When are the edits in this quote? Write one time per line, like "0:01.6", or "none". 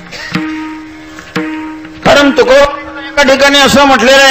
none

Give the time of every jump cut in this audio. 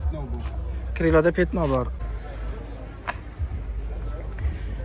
0:01.9

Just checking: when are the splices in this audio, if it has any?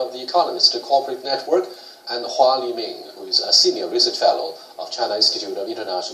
none

